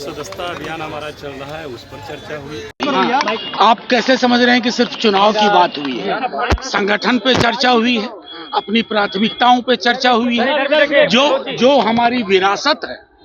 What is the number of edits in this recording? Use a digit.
1